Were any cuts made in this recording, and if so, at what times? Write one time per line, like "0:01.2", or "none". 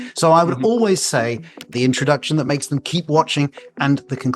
0:01.6